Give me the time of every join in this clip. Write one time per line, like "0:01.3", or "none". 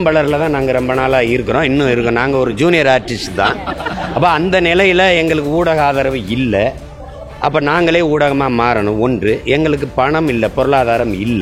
none